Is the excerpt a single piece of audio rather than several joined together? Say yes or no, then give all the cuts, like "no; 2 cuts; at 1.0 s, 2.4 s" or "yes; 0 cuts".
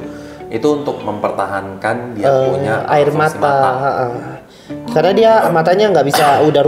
yes; 0 cuts